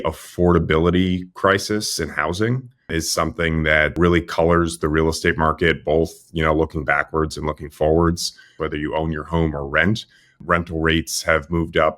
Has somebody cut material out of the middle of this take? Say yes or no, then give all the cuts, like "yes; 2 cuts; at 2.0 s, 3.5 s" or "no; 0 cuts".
yes; 4 cuts; at 2.9 s, 3.9 s, 8.6 s, 10.4 s